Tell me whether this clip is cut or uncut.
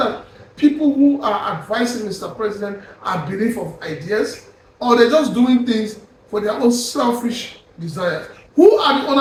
uncut